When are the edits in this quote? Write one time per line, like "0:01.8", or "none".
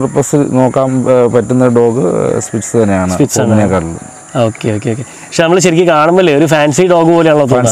none